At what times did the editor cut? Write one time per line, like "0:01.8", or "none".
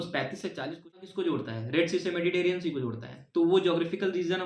0:01.0